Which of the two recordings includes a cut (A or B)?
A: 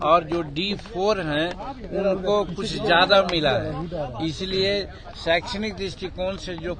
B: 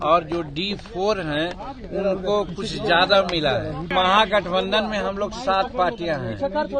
B